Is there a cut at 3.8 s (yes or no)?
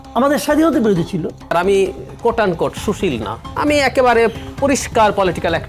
no